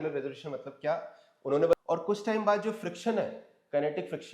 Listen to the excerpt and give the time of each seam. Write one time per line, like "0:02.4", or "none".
0:01.7